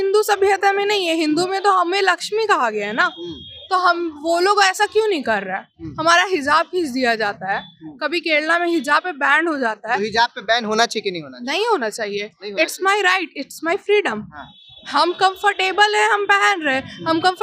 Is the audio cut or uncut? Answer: uncut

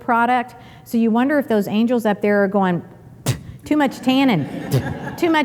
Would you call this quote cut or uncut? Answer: uncut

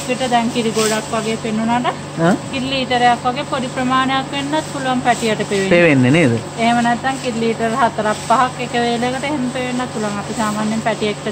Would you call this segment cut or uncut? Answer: uncut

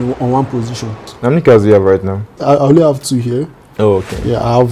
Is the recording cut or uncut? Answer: cut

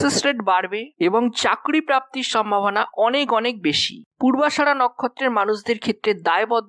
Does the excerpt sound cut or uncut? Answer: cut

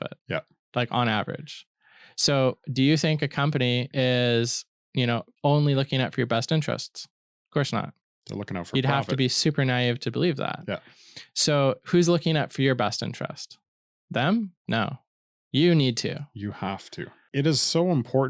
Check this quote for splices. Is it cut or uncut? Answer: cut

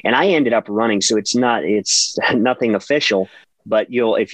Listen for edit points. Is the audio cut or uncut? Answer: cut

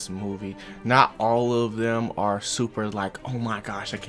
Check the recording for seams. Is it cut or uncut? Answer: uncut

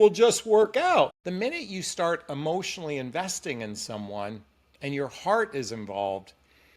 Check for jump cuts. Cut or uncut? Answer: cut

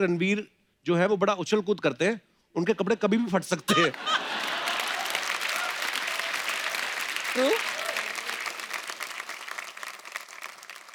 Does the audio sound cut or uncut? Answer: uncut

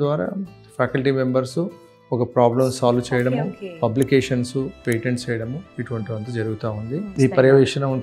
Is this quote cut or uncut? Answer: cut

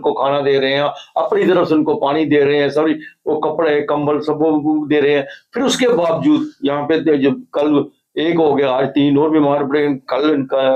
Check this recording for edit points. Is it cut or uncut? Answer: uncut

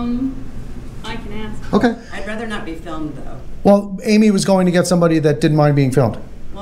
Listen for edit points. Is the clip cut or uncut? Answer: cut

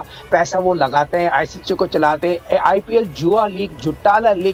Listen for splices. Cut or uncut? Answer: uncut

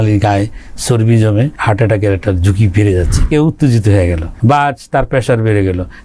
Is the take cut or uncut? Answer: cut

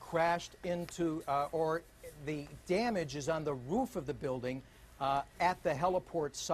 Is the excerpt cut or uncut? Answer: cut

